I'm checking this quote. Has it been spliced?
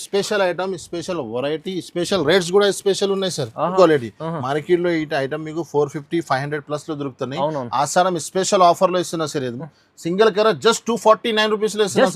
yes; 1 cut; at 3.7 s

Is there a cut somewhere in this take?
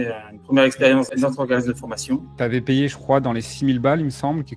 yes; 2 cuts; at 1.1 s, 2.3 s

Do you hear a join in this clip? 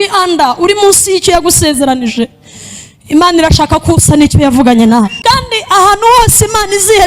yes; 1 cut; at 5.2 s

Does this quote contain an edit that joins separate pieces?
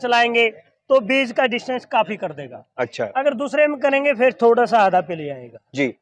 no; 0 cuts

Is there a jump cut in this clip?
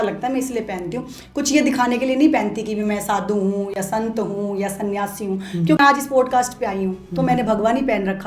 yes; 1 cut; at 5.8 s

